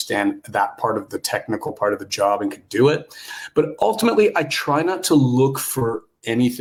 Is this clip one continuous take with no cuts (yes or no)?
yes